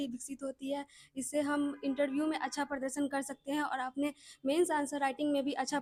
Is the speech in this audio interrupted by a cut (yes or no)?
no